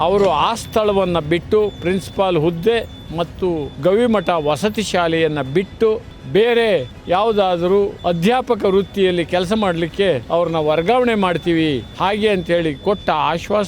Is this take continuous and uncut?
no; 6 cuts; at 3.7 s, 6.1 s, 6.9 s, 8.0 s, 10.2 s, 11.9 s

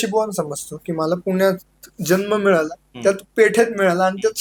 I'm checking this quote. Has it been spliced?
no; 0 cuts

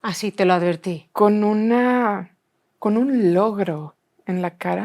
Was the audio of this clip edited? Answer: no; 0 cuts

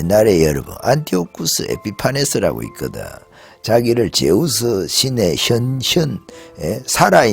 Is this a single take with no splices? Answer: yes; 0 cuts

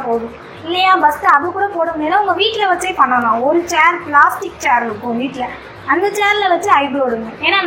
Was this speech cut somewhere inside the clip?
no; 0 cuts

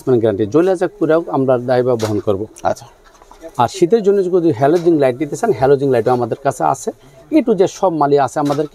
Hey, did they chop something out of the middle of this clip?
no; 0 cuts

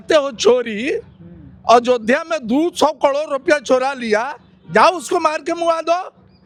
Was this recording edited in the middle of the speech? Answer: no; 0 cuts

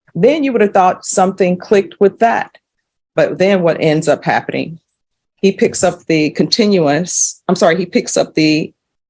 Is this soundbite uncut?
yes; 0 cuts

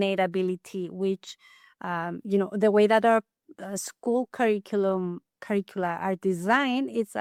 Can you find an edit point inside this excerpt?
no; 0 cuts

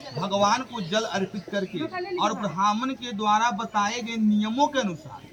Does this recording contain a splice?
no; 0 cuts

